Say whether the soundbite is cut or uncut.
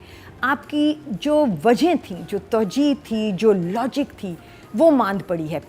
uncut